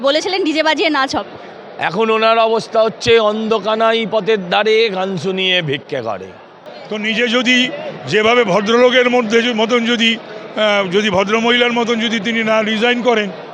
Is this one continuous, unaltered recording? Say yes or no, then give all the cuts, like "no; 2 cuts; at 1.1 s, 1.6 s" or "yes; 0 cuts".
no; 1 cut; at 6.5 s